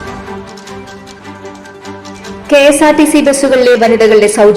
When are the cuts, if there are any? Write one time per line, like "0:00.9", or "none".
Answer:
0:01.0

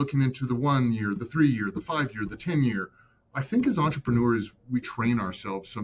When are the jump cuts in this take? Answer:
none

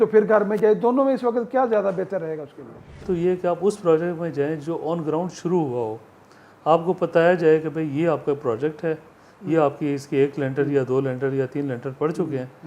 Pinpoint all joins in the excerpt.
0:03.0

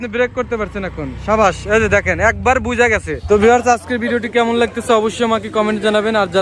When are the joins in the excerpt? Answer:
0:03.2

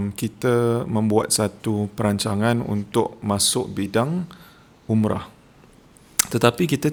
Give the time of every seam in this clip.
none

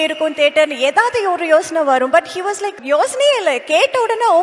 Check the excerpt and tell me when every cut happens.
0:02.8

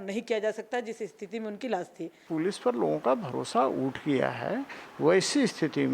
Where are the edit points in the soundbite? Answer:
0:02.2

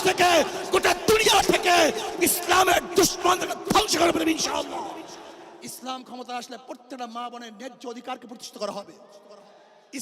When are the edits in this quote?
0:05.6

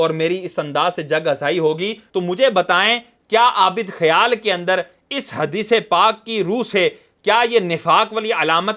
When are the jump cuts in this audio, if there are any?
0:02.1

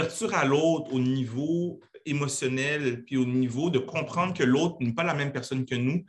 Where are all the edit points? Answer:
none

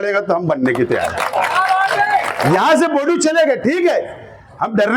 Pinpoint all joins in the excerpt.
0:02.5

